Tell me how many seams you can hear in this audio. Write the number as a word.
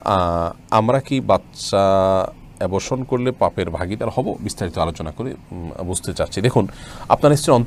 zero